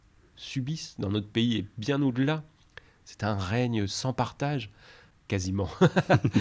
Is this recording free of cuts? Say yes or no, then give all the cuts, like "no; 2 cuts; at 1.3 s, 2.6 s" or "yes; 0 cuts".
yes; 0 cuts